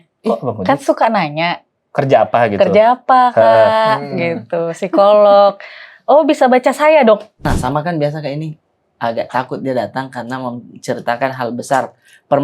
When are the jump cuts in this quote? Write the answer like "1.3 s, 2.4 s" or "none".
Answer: 7.5 s